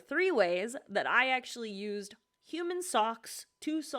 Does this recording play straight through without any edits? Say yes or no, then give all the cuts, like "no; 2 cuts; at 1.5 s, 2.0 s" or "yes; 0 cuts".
yes; 0 cuts